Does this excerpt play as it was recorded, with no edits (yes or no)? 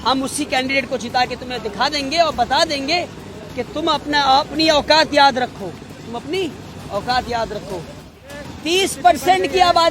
no